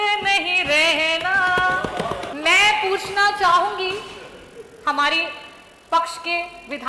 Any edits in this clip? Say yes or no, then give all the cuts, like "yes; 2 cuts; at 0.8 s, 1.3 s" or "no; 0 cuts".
yes; 1 cut; at 2.3 s